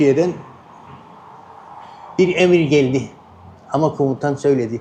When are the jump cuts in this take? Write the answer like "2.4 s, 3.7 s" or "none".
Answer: none

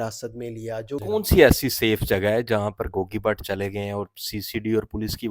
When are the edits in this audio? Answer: 1.0 s

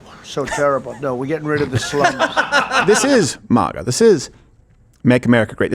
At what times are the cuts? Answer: 2.8 s

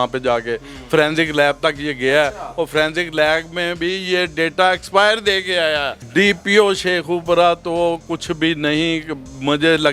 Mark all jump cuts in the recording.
6.0 s

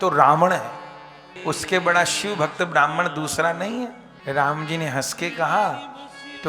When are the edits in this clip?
1.3 s, 4.1 s

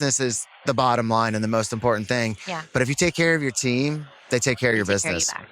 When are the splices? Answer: none

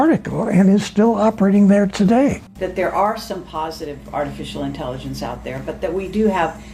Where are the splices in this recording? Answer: 2.5 s

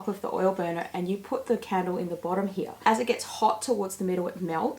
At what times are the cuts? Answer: 2.9 s

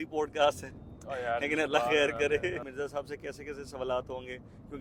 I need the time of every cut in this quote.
2.7 s

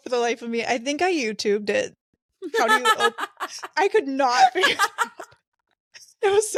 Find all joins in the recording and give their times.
none

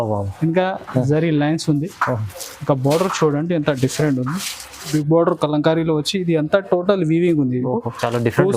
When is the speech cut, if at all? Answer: 4.9 s

